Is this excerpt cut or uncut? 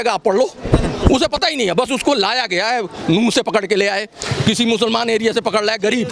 uncut